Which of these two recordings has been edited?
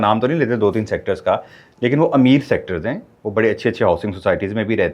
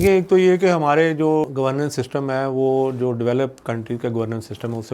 second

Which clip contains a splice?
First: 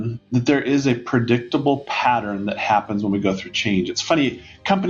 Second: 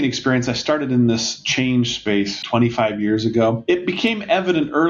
second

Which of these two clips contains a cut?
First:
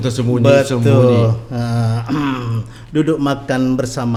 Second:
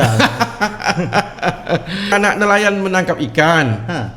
second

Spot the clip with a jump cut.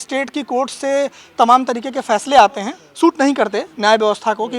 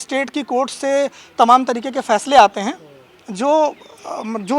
first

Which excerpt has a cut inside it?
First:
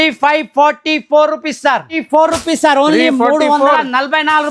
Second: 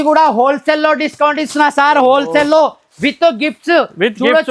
first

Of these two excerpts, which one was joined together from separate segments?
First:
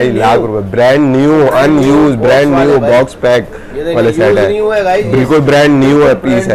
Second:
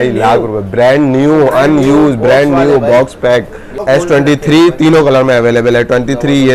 second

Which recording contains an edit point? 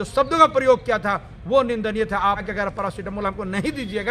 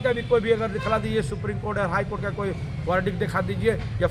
first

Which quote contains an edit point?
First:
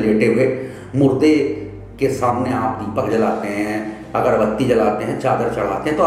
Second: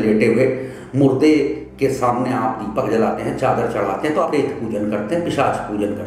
second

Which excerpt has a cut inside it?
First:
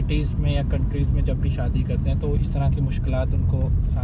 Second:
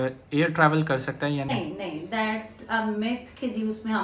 second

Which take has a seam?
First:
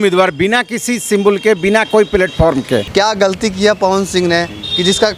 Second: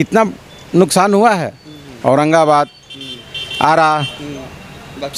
first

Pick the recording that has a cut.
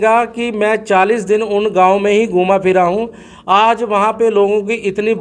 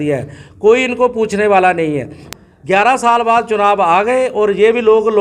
second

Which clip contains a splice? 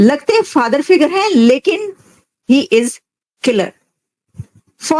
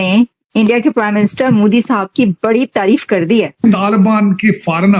second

